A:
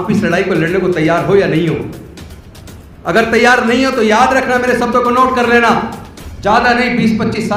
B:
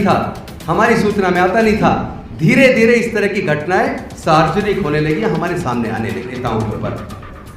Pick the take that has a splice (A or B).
B